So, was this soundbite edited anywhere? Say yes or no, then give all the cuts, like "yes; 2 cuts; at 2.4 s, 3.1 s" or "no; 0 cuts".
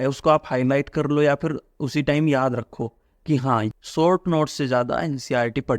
yes; 1 cut; at 3.7 s